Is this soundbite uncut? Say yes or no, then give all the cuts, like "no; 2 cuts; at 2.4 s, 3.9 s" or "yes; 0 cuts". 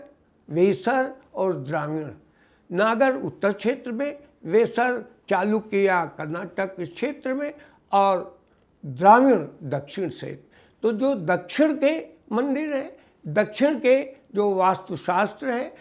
yes; 0 cuts